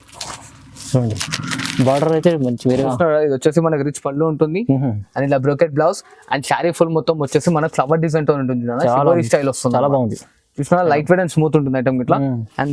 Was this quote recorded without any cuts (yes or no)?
no